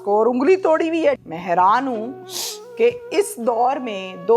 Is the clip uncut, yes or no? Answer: no